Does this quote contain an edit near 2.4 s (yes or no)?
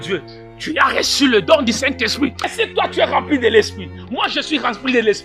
yes